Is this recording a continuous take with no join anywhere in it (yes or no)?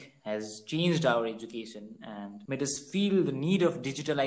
yes